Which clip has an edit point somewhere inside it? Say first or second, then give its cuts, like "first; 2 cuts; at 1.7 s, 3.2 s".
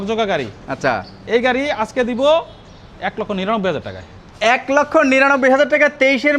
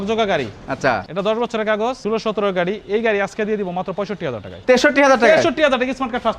second; 3 cuts; at 1.1 s, 2.0 s, 4.5 s